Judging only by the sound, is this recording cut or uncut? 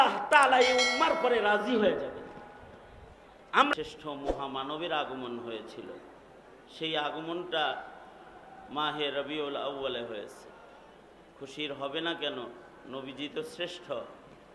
cut